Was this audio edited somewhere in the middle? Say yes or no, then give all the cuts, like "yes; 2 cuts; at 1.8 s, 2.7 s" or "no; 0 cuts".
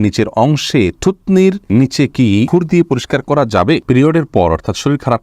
yes; 3 cuts; at 1.6 s, 2.5 s, 3.8 s